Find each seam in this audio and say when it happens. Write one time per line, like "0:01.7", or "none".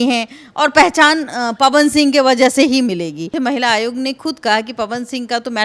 0:03.3

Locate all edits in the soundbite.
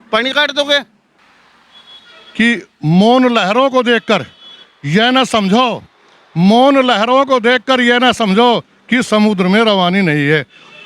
0:01.1

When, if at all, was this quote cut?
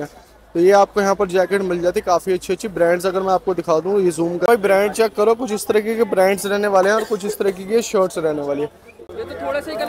0:04.5
0:08.9

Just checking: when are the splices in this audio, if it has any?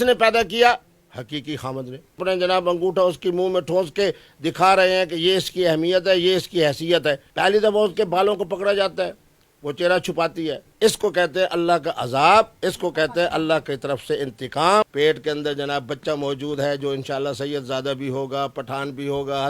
0:02.2
0:07.2
0:10.6
0:14.9

